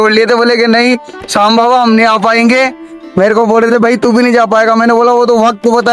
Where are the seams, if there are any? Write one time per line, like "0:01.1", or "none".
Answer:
none